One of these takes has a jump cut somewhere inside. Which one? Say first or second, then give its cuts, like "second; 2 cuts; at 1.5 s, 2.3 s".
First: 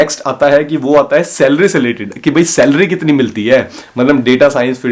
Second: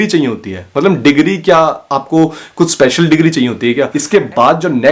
second; 1 cut; at 4.0 s